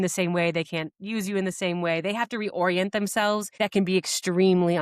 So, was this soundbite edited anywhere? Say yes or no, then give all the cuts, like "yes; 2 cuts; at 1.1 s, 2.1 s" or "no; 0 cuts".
yes; 1 cut; at 3.5 s